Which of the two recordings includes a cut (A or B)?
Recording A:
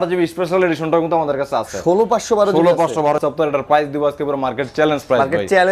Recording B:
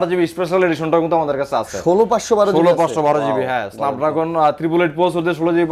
A